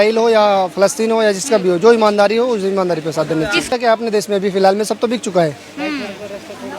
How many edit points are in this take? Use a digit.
1